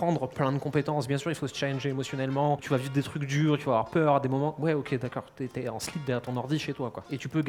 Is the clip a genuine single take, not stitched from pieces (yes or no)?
yes